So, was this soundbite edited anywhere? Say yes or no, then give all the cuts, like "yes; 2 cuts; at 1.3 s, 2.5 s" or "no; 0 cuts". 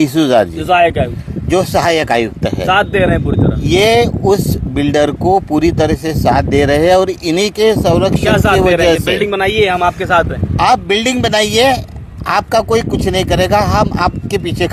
no; 0 cuts